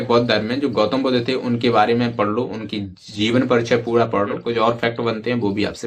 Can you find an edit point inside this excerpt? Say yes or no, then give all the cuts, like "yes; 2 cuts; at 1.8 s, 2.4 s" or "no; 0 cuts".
yes; 1 cut; at 4.4 s